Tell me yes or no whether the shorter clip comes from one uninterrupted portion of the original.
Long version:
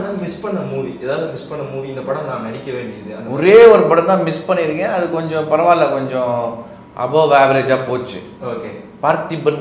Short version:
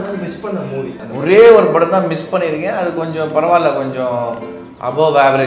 no